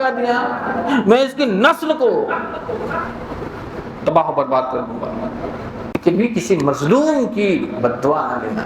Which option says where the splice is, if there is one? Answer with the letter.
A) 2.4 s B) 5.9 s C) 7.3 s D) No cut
B